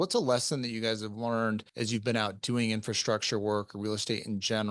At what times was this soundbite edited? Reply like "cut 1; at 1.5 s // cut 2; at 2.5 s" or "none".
cut 1; at 1.7 s